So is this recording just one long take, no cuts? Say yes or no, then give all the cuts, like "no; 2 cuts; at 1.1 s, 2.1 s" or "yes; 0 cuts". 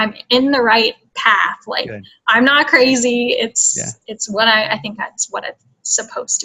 yes; 0 cuts